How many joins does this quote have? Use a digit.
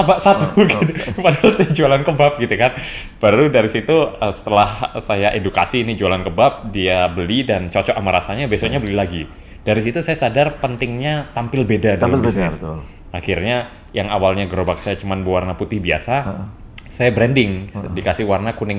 0